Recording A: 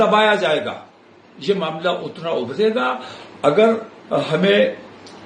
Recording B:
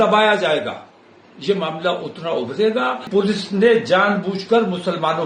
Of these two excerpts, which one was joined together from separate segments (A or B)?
B